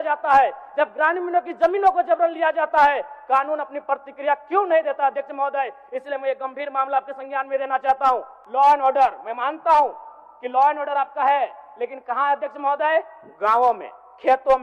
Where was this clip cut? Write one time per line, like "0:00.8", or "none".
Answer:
0:08.4